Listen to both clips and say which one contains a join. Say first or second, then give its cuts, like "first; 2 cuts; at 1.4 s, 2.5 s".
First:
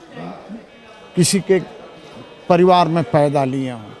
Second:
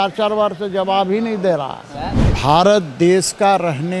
second; 1 cut; at 2.2 s